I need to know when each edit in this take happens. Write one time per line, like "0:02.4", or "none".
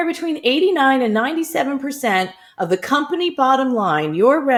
none